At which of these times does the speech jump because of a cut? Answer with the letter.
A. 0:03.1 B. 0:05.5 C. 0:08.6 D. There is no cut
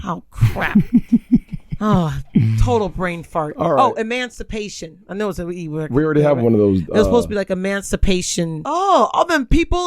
C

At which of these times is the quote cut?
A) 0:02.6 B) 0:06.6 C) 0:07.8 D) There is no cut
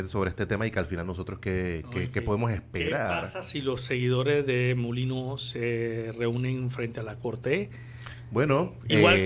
D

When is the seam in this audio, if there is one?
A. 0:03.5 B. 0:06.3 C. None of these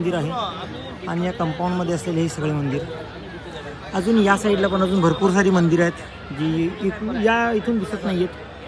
C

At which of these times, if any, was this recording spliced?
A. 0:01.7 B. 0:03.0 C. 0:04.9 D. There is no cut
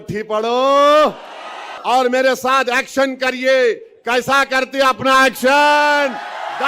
A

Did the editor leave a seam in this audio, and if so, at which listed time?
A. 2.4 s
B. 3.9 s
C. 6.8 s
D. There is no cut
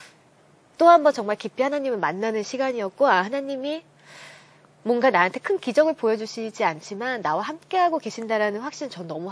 D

